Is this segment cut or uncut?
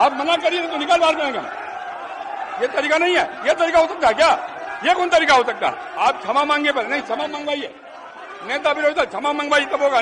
cut